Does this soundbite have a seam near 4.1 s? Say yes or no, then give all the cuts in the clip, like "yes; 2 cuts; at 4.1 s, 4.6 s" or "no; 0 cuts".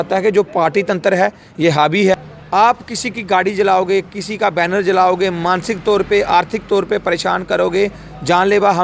no; 1 cut; at 2.3 s